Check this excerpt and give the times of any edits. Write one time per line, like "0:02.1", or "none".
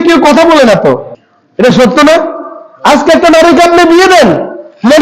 none